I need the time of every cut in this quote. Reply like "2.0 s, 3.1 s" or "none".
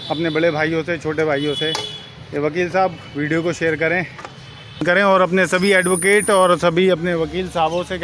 4.8 s